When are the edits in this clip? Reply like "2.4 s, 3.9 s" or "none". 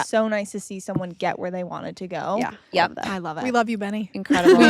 none